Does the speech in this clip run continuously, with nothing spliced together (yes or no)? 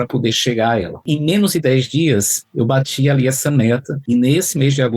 no